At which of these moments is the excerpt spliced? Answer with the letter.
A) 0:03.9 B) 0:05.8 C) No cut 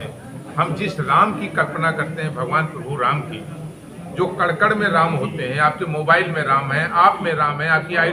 C